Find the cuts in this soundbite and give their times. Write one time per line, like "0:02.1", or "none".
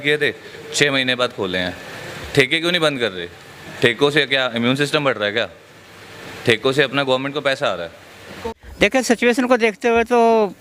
0:08.4